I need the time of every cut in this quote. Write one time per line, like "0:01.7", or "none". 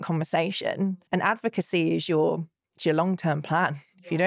0:00.9

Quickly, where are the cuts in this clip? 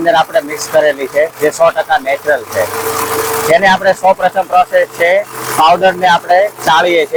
none

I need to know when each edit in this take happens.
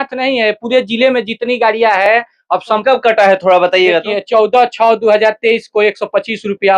0:02.8

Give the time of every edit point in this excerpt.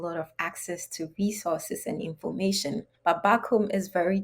0:02.9

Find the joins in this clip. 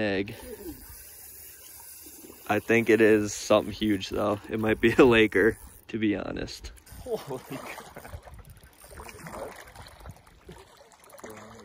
none

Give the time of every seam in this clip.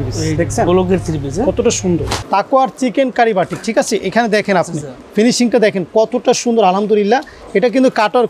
0:02.2

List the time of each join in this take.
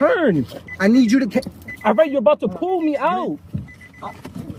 none

